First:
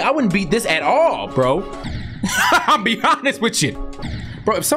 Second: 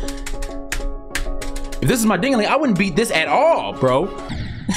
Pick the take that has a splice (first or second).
first